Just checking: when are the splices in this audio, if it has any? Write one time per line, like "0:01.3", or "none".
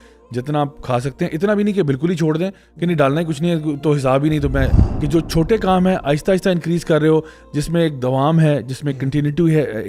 0:04.8